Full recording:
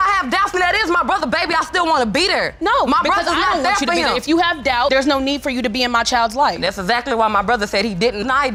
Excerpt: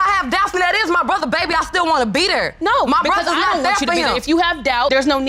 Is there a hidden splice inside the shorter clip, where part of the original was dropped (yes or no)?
no